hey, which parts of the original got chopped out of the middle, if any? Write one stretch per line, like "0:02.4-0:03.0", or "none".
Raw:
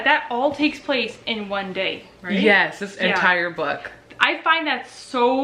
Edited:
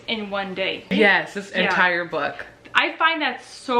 0:02.1-0:02.4